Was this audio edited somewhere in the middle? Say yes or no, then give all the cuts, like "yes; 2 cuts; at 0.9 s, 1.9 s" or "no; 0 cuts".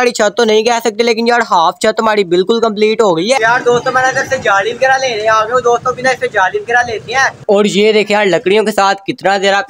yes; 2 cuts; at 3.4 s, 7.4 s